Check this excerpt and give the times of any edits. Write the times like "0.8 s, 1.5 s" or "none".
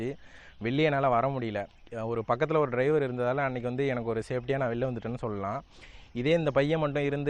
none

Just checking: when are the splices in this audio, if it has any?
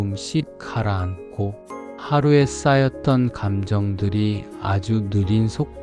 none

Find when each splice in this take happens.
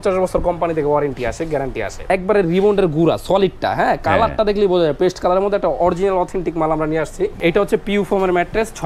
2.0 s, 7.4 s

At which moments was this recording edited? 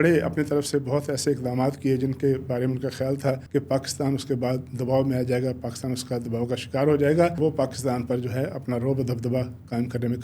3.4 s, 7.4 s

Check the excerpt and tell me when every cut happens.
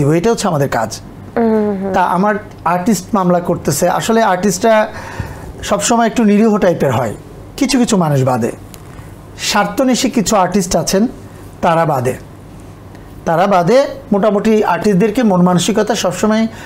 none

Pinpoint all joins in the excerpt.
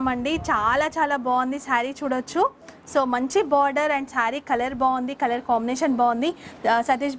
none

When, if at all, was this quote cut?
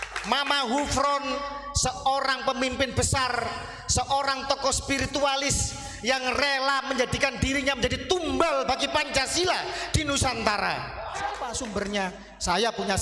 11.5 s

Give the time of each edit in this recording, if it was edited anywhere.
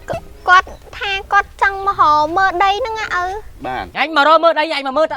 3.9 s

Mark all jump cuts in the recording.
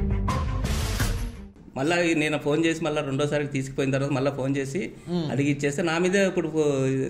1.5 s

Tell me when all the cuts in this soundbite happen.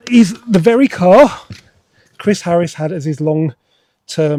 none

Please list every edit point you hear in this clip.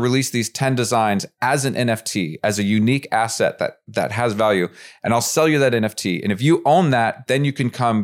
none

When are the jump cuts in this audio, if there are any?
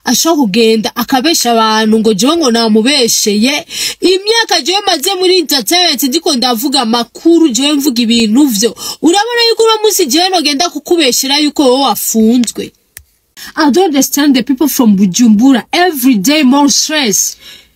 13.4 s

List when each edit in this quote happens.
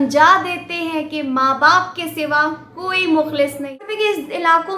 3.9 s

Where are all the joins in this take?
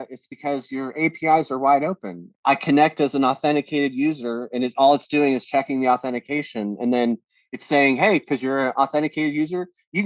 none

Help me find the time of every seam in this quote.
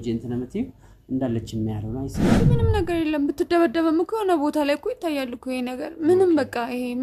2.3 s

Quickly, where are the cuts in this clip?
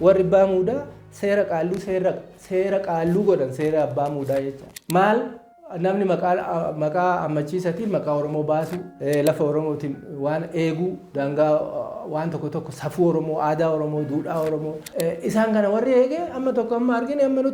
8.8 s, 14.8 s

